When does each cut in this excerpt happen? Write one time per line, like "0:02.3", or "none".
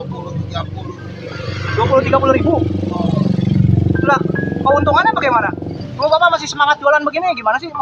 0:05.8